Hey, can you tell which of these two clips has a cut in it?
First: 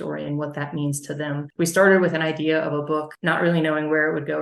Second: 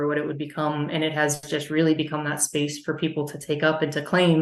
first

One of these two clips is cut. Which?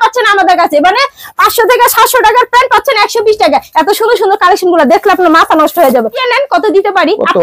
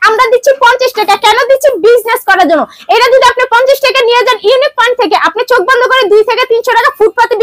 first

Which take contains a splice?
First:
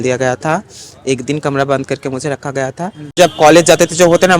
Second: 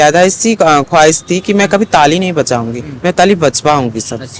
first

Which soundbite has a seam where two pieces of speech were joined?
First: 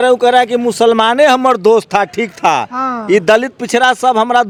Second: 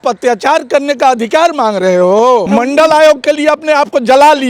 second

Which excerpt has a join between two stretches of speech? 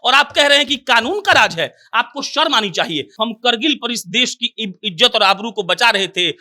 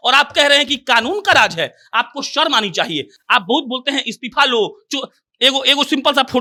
first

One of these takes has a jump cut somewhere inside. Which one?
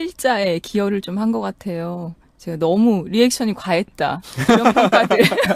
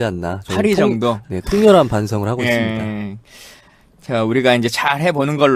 first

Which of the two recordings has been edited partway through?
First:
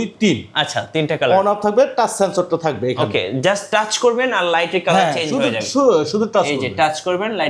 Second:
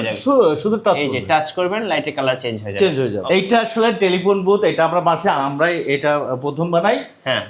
second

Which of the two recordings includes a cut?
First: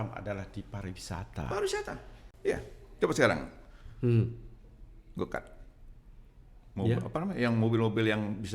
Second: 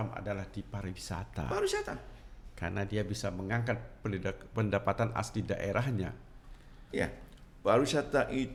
first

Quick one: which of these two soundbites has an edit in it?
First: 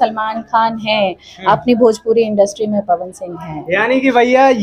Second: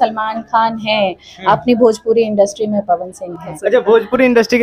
second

